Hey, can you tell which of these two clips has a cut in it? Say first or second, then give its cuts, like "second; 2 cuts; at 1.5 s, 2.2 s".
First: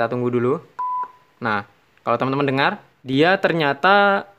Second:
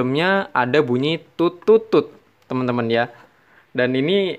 first; 1 cut; at 2.9 s